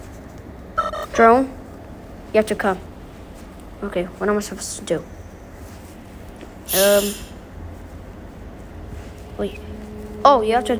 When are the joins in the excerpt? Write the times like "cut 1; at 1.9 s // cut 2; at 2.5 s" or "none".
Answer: none